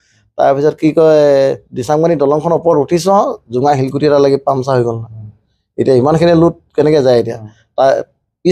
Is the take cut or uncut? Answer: uncut